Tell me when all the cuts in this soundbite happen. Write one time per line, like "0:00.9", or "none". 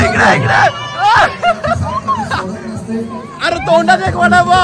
none